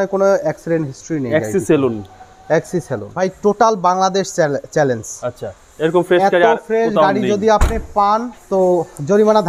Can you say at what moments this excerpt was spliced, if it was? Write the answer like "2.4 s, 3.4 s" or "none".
3.1 s